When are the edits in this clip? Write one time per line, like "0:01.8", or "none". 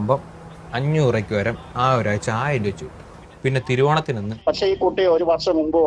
0:04.3